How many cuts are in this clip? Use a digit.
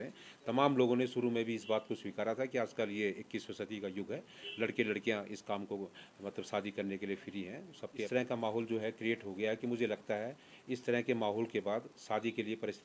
1